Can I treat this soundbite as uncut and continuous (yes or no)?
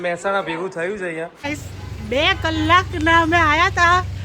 no